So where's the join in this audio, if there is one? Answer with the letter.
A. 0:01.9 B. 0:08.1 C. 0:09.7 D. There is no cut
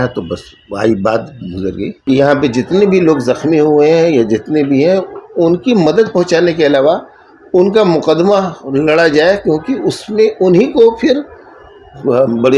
A